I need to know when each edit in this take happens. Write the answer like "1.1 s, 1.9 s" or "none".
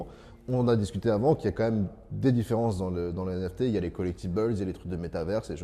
none